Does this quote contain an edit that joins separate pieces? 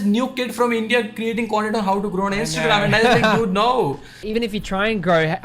yes; 1 cut; at 4.2 s

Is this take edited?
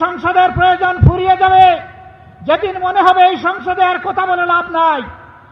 no; 0 cuts

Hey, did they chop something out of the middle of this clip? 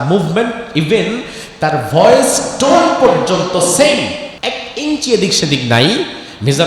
yes; 1 cut; at 4.3 s

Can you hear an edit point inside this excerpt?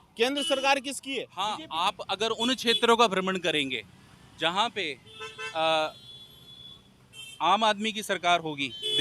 yes; 1 cut; at 1.3 s

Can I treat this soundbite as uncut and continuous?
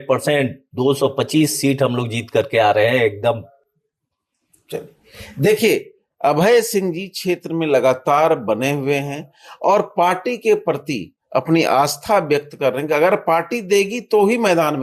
yes; 0 cuts

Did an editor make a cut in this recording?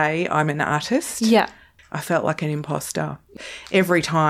yes; 2 cuts; at 1.7 s, 3.2 s

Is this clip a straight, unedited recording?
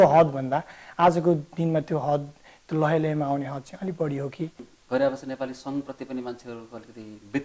no; 1 cut; at 4.6 s

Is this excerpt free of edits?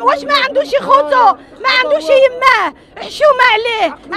yes; 0 cuts

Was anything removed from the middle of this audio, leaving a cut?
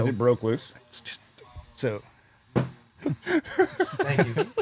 no; 0 cuts

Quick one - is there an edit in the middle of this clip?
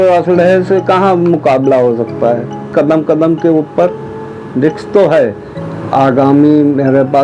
yes; 2 cuts; at 2.7 s, 5.5 s

